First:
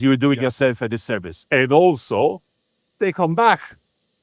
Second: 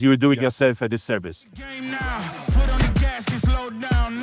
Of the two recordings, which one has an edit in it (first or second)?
second